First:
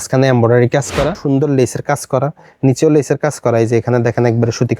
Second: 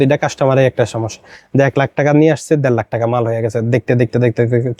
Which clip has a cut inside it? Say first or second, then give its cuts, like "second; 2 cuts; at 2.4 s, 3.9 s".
first; 1 cut; at 1.2 s